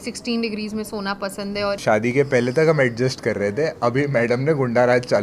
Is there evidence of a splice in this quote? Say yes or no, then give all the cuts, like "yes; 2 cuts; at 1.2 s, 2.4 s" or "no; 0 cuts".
yes; 1 cut; at 1.8 s